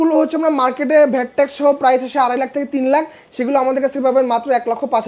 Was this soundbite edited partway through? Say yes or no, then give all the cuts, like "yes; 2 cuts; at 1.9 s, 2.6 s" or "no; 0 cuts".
no; 0 cuts